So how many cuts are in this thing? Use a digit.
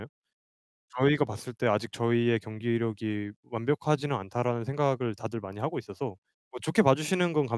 1